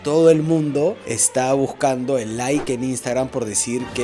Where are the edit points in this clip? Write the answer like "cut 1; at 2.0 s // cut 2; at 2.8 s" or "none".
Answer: cut 1; at 1.1 s